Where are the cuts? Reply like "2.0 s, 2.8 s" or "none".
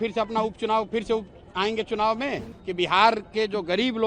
2.5 s